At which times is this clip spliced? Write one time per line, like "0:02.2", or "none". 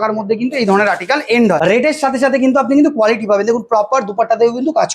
0:01.6